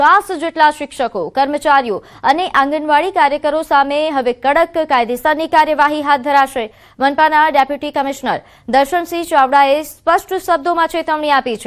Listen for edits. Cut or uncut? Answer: cut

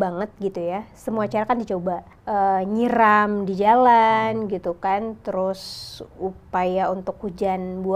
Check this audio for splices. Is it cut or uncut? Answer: cut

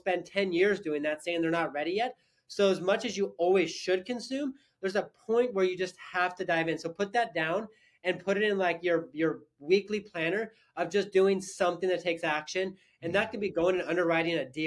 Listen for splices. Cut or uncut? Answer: uncut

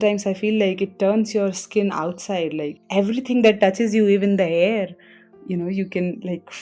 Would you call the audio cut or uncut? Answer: cut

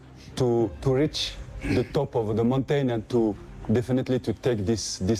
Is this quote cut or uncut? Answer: uncut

